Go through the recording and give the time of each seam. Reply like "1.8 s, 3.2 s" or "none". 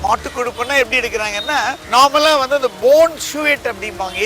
1.8 s